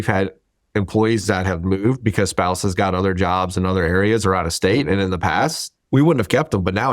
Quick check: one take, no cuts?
no; 1 cut; at 5.7 s

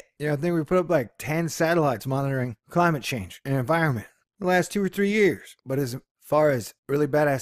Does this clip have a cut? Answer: yes; 1 cut; at 2.0 s

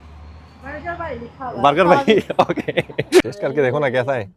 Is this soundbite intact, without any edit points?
no; 1 cut; at 3.2 s

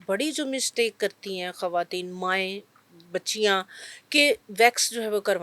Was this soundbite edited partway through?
no; 0 cuts

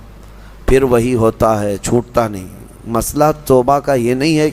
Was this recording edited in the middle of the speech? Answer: no; 0 cuts

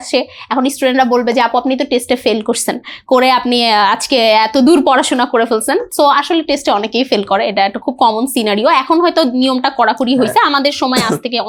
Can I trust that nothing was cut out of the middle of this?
yes; 0 cuts

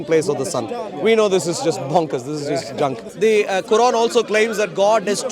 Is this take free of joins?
no; 1 cut; at 3.0 s

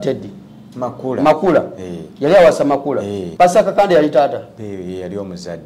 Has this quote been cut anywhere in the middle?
yes; 1 cut; at 3.2 s

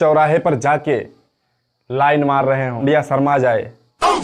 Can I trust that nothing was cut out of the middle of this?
no; 1 cut; at 2.8 s

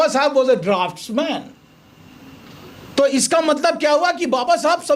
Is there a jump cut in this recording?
no; 0 cuts

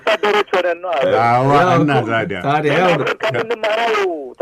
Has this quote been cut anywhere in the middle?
no; 0 cuts

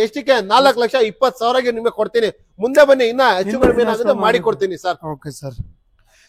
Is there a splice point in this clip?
no; 0 cuts

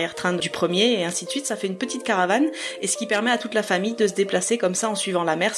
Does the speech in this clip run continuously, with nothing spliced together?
yes; 0 cuts

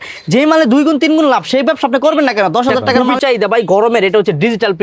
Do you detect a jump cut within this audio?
yes; 1 cut; at 3.0 s

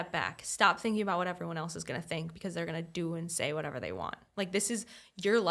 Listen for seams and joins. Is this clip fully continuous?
yes; 0 cuts

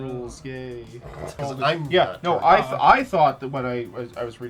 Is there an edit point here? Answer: yes; 1 cut; at 1.3 s

